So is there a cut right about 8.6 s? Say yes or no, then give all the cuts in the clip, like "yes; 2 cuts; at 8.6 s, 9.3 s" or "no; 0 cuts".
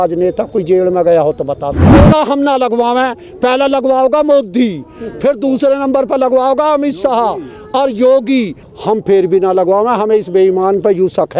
yes; 2 cuts; at 2.0 s, 8.6 s